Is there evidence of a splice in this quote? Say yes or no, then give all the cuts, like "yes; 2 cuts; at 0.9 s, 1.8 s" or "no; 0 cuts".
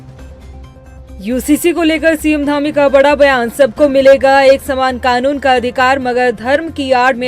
yes; 1 cut; at 1.0 s